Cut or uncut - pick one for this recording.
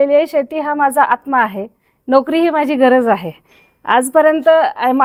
uncut